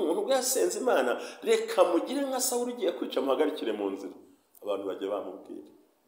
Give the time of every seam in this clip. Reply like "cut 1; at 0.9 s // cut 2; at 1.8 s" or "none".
none